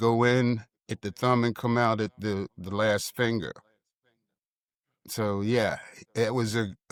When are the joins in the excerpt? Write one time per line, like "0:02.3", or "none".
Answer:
none